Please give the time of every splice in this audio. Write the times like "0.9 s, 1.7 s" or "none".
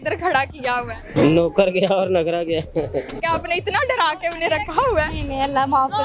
1.1 s, 3.2 s